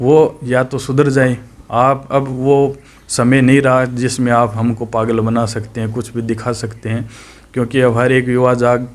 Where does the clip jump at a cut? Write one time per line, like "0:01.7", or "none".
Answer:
0:01.6

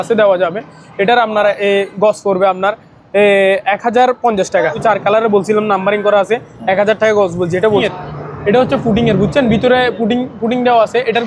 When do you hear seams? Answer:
0:04.8
0:07.8

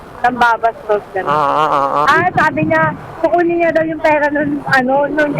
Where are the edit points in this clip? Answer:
0:02.1

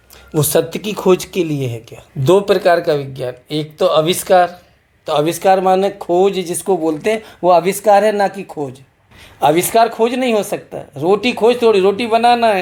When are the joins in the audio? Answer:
none

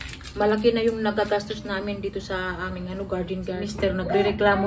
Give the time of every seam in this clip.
0:03.6

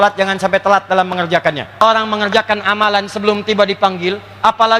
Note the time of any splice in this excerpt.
0:01.8

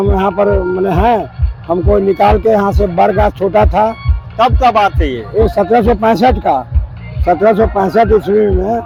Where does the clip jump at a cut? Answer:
none

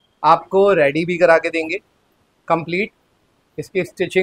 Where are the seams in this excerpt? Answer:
none

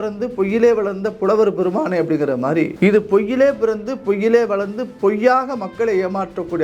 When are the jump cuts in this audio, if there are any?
0:02.7

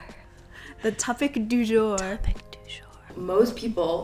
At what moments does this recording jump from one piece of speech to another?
0:03.1

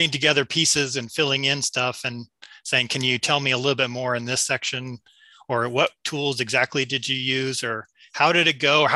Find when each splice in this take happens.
none

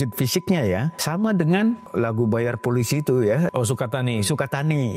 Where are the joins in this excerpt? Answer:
0:01.0
0:01.8
0:03.5

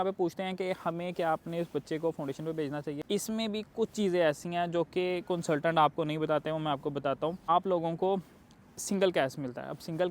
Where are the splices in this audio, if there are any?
0:03.0
0:07.5

